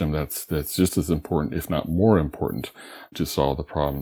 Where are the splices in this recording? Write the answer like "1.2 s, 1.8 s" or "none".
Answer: 3.1 s